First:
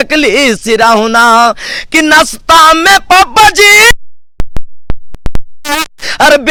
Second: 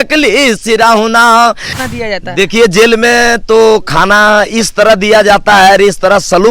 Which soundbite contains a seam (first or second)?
second